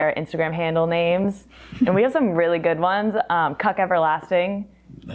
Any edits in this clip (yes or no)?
no